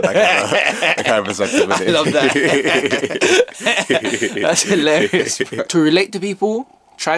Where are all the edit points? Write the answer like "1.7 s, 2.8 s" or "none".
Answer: none